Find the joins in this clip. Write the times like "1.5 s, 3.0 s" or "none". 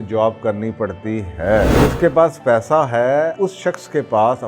1.7 s, 3.3 s